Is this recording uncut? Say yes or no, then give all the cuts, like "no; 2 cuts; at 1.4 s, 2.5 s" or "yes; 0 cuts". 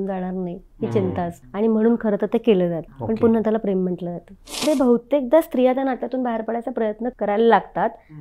no; 4 cuts; at 1.4 s, 2.9 s, 4.6 s, 7.1 s